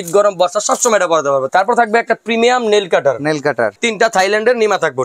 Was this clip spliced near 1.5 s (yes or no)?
yes